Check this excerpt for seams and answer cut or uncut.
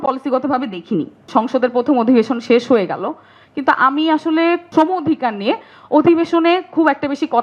cut